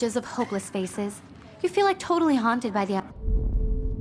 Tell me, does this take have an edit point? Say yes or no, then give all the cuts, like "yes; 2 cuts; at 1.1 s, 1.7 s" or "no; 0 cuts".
no; 0 cuts